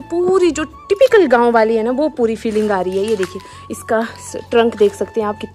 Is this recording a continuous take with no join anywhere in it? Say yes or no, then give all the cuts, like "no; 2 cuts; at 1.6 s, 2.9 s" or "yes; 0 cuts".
yes; 0 cuts